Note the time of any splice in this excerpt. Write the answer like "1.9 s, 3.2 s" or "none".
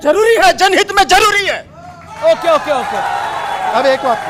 none